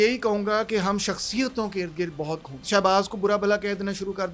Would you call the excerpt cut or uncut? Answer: cut